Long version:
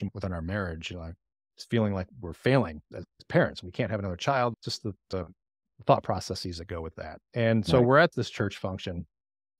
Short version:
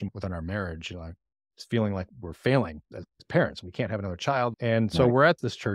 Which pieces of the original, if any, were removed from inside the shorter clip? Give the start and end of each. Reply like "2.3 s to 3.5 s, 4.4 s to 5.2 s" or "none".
4.6 s to 7.3 s